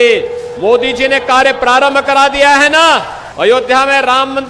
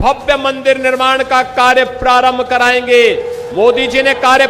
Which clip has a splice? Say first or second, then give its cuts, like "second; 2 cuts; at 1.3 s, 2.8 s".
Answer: first; 1 cut; at 3.2 s